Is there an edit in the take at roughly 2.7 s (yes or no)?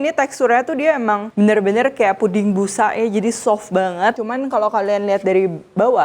no